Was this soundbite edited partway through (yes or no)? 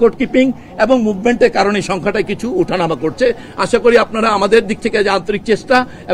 no